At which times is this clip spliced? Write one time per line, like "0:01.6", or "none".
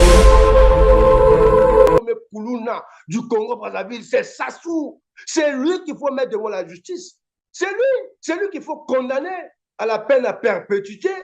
0:02.0